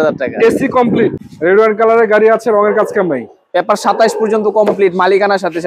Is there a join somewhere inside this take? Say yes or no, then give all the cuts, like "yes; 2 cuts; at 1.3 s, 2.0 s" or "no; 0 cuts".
yes; 1 cut; at 0.9 s